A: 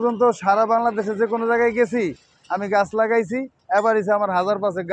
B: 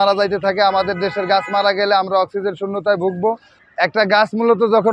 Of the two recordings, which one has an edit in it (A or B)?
B